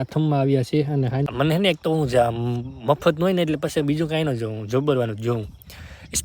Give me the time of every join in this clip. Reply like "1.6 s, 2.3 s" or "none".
1.3 s